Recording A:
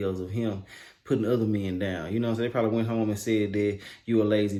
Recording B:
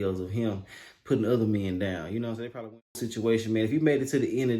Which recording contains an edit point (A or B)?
B